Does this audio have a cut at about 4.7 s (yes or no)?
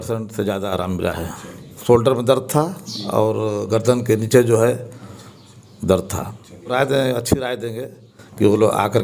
no